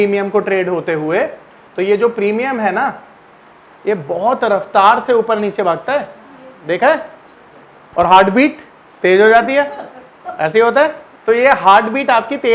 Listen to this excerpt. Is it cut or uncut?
cut